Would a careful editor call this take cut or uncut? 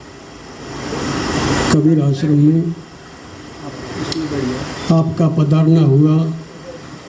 uncut